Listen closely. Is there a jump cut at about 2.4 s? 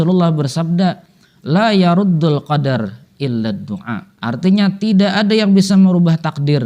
no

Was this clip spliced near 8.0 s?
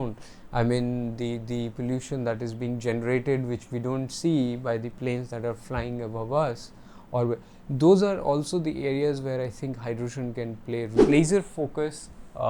no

